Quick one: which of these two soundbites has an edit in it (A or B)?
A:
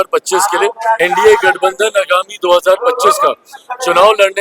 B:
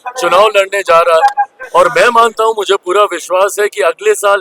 A